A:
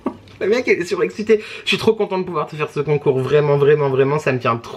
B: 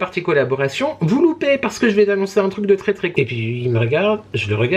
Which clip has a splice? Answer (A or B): B